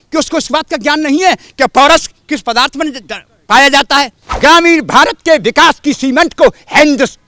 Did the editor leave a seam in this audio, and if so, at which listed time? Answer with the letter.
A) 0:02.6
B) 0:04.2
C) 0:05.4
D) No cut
B